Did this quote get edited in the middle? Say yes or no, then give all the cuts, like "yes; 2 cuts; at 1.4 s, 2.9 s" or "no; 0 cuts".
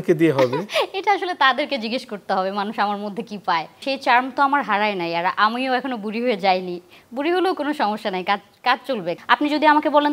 yes; 2 cuts; at 3.8 s, 9.1 s